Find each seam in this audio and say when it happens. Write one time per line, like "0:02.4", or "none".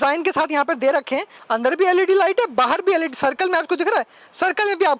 0:01.3